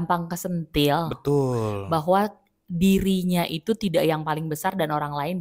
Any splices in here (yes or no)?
no